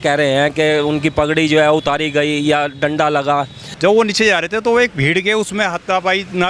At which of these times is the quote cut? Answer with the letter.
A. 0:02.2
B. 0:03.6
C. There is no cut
B